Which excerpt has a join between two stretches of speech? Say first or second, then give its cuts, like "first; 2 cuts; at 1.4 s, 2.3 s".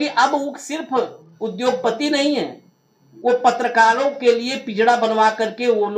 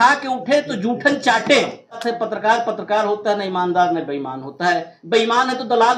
second; 1 cut; at 2.0 s